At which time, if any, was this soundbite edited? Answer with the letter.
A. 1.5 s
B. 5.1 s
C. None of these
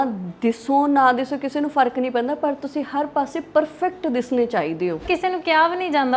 B